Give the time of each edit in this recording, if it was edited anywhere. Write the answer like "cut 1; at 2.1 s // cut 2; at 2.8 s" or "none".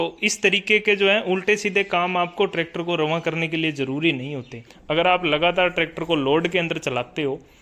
cut 1; at 4.6 s